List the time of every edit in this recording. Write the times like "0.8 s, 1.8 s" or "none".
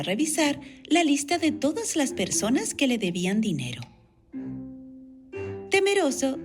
3.5 s